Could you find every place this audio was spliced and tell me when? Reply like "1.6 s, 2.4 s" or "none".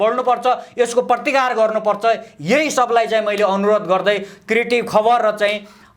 none